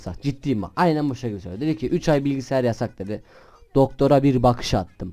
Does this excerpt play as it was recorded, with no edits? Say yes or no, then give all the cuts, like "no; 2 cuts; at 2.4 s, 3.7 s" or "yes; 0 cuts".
yes; 0 cuts